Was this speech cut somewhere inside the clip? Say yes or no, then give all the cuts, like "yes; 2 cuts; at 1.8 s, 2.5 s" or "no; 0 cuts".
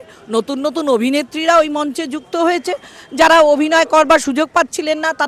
no; 0 cuts